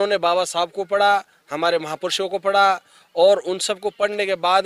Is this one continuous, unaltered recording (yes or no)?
yes